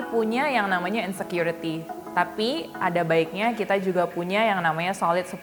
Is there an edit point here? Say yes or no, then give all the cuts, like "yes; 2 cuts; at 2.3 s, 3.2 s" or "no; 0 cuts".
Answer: no; 0 cuts